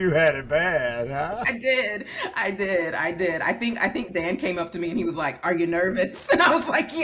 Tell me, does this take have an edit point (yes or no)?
no